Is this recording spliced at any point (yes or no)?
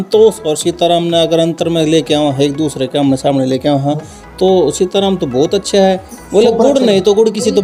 no